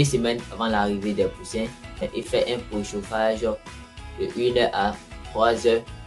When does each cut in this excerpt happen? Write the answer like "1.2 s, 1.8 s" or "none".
2.2 s